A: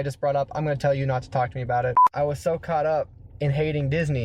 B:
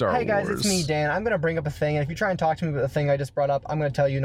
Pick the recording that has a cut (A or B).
A